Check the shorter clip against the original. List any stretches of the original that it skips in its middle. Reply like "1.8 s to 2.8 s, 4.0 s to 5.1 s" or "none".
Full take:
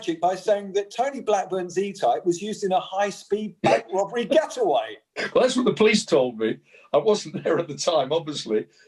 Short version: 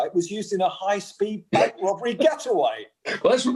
none